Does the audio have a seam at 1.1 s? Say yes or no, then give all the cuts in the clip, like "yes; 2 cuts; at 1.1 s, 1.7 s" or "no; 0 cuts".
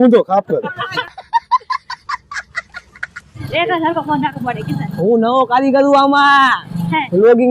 yes; 2 cuts; at 1.1 s, 3.3 s